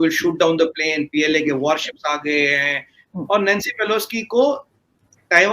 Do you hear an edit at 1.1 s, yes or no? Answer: no